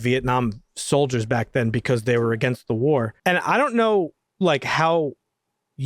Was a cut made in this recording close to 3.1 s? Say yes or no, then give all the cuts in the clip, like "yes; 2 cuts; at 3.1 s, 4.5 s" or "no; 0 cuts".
yes; 1 cut; at 3.1 s